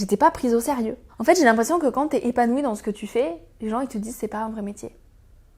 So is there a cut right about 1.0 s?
yes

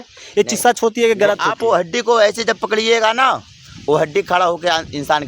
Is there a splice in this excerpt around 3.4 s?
no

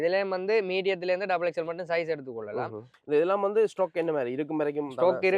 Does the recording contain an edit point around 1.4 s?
no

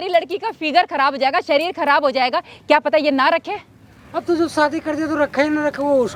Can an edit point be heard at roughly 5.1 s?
no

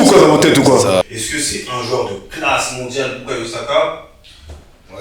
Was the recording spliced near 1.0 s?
yes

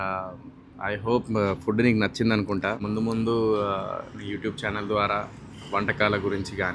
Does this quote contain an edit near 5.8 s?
no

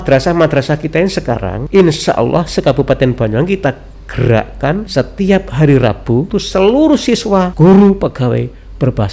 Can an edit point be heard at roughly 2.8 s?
no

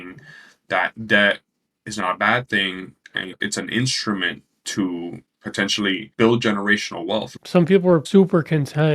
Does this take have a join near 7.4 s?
yes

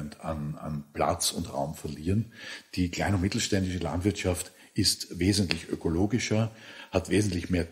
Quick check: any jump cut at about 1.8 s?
no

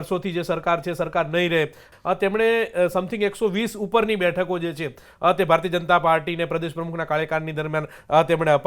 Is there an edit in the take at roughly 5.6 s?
no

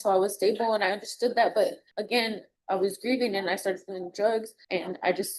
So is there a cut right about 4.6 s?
yes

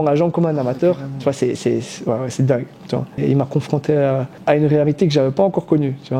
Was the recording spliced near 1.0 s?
no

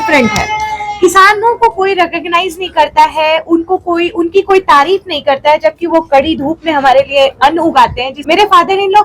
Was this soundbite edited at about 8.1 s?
yes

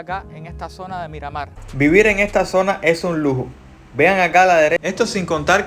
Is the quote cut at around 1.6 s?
yes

